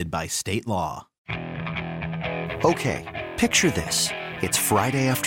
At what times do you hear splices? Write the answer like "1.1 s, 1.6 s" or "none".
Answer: 1.2 s